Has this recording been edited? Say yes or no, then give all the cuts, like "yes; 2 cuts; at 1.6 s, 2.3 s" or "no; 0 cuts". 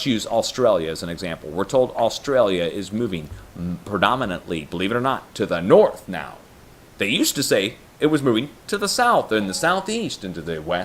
no; 0 cuts